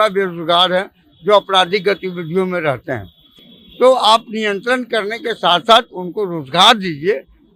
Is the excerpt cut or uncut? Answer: uncut